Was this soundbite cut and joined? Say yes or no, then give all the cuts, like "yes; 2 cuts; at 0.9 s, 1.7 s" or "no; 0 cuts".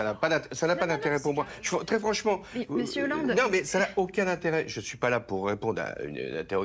yes; 1 cut; at 3.7 s